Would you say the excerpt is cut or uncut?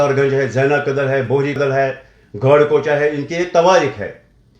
cut